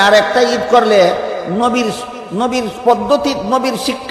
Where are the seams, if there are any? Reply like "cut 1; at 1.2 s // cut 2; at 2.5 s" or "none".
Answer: none